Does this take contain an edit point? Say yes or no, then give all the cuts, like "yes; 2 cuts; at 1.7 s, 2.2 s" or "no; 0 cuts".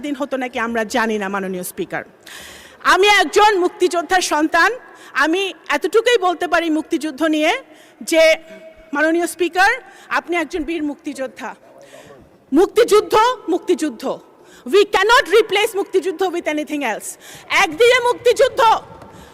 no; 0 cuts